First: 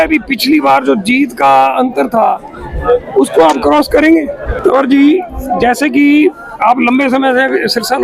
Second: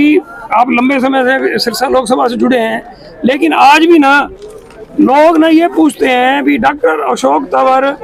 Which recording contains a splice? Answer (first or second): first